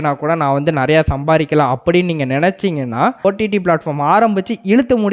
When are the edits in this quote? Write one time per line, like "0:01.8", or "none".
0:03.2